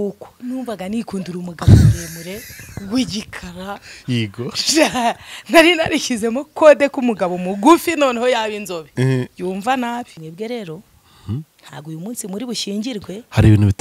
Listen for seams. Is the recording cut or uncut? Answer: cut